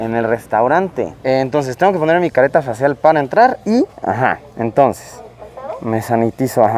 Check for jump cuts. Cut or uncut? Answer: uncut